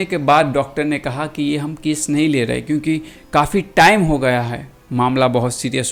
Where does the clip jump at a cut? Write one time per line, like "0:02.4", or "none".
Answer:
none